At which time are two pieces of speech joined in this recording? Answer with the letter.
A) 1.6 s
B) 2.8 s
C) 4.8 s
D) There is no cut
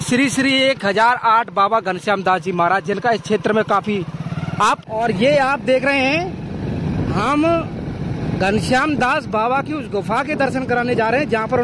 C